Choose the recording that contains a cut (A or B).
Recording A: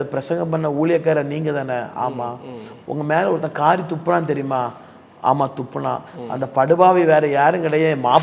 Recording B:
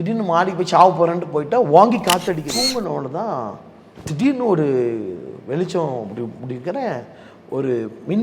B